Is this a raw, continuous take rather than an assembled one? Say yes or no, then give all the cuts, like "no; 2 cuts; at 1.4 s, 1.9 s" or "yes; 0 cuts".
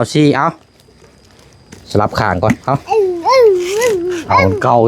yes; 0 cuts